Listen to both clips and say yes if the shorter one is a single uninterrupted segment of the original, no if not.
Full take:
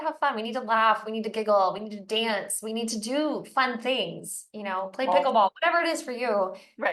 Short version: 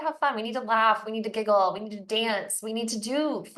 yes